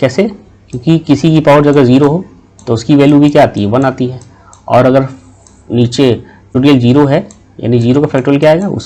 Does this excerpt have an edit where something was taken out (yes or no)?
no